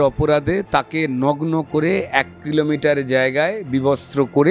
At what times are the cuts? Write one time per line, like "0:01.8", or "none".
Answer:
none